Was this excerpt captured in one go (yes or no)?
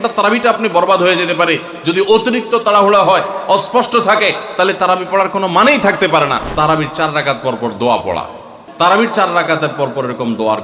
no